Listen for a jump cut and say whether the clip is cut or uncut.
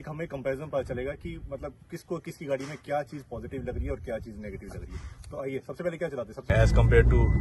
cut